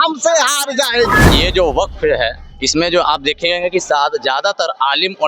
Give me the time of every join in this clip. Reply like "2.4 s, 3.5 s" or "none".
1.3 s